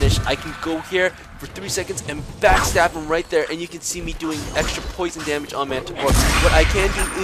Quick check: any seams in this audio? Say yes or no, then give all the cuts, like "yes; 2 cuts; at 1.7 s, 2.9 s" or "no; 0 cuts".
no; 0 cuts